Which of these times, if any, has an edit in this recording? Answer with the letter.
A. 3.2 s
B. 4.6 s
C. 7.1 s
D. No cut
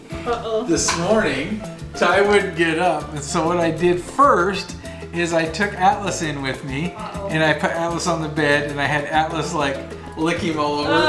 D